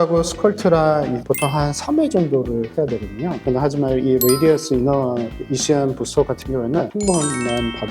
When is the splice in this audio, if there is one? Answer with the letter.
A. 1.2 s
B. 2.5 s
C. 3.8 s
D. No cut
A